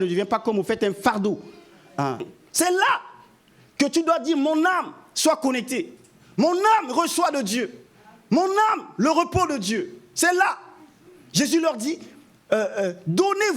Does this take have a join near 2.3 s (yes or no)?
yes